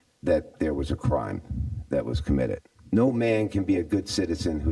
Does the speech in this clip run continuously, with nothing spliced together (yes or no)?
no